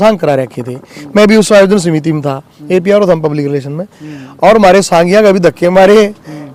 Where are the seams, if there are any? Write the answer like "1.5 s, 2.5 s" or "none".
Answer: none